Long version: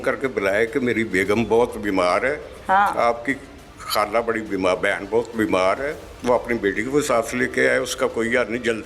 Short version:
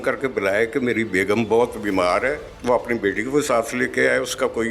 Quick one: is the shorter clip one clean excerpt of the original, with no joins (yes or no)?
no